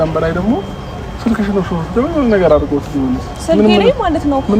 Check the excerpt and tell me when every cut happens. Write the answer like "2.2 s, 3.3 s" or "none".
none